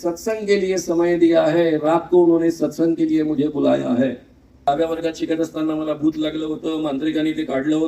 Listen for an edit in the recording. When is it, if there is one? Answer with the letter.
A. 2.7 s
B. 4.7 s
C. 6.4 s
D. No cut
B